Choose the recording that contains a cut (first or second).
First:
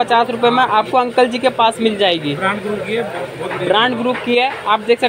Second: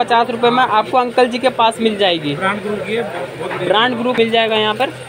second